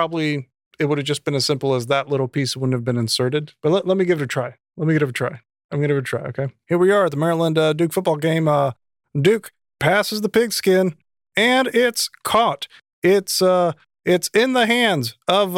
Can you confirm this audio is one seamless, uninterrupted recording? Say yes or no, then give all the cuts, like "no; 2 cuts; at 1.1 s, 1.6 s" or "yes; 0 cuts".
no; 2 cuts; at 3.5 s, 6.6 s